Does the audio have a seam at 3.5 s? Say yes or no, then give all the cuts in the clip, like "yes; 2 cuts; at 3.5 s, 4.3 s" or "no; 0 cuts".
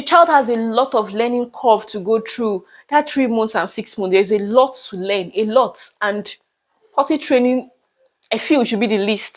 no; 0 cuts